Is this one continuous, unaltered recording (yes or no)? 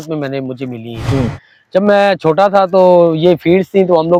yes